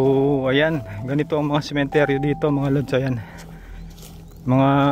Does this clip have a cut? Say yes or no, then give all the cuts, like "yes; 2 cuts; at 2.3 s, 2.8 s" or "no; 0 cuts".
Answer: no; 0 cuts